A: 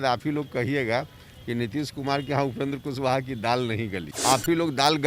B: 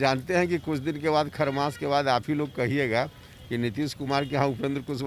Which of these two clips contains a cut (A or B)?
A